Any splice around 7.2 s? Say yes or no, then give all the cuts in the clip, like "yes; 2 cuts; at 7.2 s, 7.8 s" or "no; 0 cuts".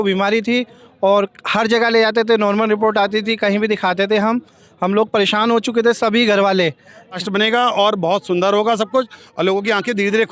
yes; 1 cut; at 7.2 s